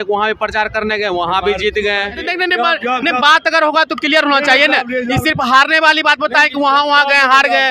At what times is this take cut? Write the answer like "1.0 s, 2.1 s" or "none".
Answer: 2.2 s